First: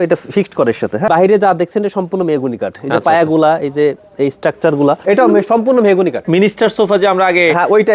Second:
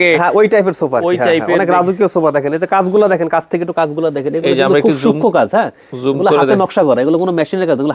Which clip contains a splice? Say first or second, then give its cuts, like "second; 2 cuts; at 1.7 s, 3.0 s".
first; 3 cuts; at 1.1 s, 5.0 s, 6.2 s